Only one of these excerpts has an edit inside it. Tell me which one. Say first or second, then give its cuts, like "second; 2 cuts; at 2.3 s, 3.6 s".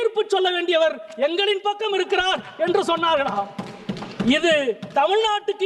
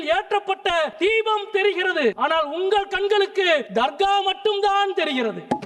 second; 3 cuts; at 0.9 s, 2.2 s, 3.7 s